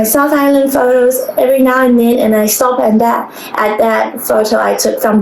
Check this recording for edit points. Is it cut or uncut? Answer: uncut